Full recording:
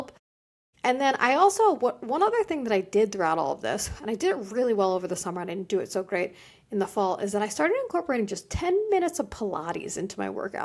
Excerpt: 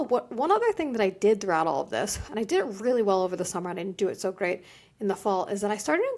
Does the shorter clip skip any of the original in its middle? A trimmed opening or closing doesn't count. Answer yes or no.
no